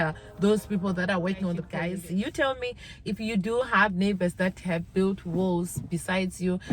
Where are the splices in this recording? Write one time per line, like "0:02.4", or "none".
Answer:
0:01.7